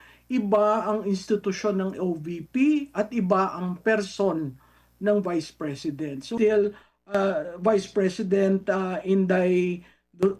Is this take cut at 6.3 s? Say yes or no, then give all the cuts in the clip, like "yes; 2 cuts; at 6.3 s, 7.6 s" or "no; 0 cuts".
yes; 1 cut; at 6.3 s